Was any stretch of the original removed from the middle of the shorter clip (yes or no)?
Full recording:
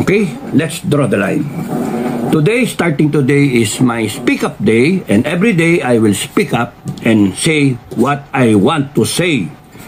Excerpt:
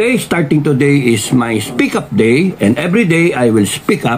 no